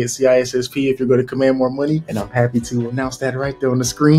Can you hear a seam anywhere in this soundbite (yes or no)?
yes